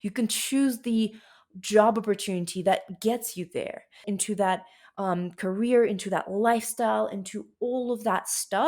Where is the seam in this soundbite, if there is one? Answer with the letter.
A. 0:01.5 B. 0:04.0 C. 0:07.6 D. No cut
B